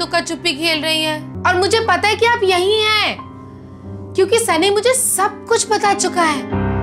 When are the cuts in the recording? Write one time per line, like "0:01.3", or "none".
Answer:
0:01.3